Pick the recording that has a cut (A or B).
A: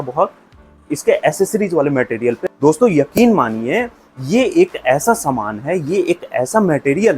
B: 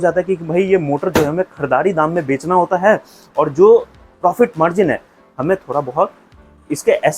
A